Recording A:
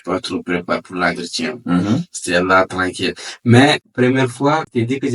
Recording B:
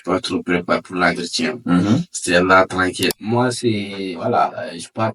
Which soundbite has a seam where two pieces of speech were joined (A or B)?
B